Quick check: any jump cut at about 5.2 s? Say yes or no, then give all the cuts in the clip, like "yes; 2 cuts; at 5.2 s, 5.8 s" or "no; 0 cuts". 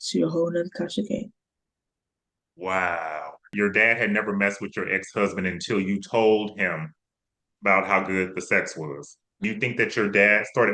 no; 2 cuts; at 3.5 s, 9.4 s